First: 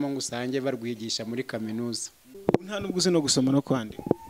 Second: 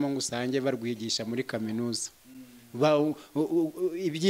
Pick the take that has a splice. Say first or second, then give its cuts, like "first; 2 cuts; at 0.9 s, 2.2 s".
first; 1 cut; at 2.4 s